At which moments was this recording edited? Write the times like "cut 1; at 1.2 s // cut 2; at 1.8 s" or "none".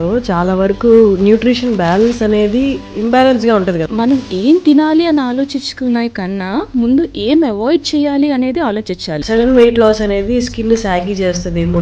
cut 1; at 2.9 s // cut 2; at 3.9 s // cut 3; at 9.1 s